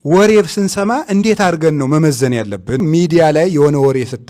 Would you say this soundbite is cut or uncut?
cut